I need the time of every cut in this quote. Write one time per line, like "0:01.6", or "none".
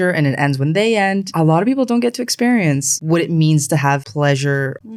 none